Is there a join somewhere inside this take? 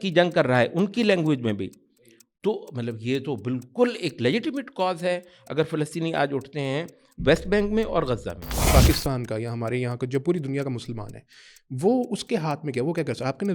yes; 1 cut; at 8.6 s

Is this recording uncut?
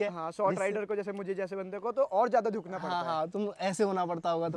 yes; 0 cuts

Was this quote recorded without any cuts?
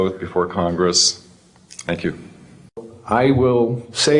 no; 1 cut; at 2.8 s

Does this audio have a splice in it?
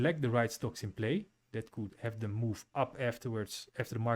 yes; 1 cut; at 1.9 s

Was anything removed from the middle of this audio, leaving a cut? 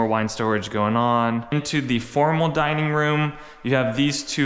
no; 0 cuts

